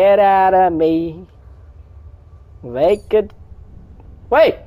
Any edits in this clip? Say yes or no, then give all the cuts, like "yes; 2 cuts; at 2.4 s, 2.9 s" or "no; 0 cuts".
no; 0 cuts